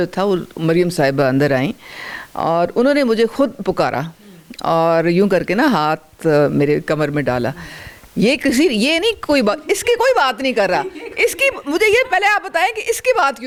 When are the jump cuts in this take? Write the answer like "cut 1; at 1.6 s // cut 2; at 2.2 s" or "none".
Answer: none